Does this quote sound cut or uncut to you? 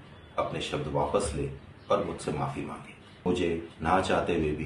cut